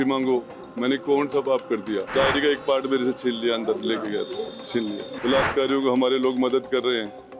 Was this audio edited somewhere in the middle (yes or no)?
yes